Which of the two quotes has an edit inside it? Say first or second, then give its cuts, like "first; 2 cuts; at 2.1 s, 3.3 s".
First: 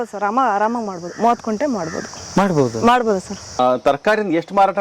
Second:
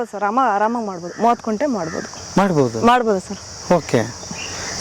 first; 1 cut; at 3.6 s